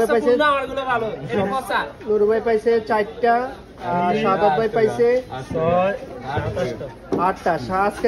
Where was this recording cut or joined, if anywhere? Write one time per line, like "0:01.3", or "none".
none